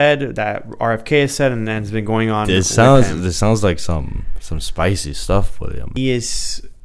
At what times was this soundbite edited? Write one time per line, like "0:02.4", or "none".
0:05.9